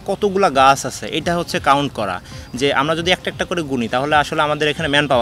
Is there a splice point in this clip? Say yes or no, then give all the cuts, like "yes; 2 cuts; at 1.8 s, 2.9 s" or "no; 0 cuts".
no; 0 cuts